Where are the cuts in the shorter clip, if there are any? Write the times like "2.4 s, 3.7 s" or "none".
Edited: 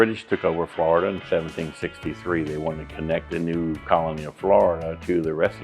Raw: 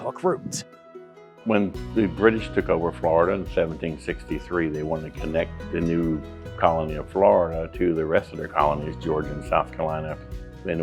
3.5 s